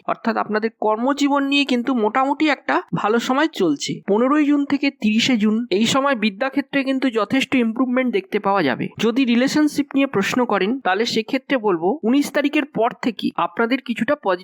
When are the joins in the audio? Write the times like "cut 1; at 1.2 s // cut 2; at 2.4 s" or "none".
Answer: cut 1; at 4.0 s // cut 2; at 8.9 s